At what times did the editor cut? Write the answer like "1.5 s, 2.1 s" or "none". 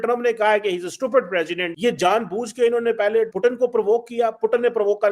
1.7 s, 3.3 s